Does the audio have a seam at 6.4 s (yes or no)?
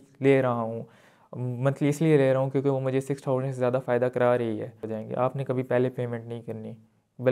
no